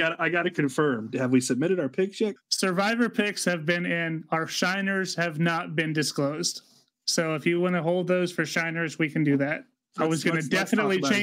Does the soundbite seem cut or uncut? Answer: cut